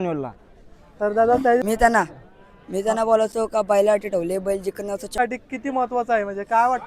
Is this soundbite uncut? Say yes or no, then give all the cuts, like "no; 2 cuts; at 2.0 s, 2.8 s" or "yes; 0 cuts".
no; 2 cuts; at 1.6 s, 5.2 s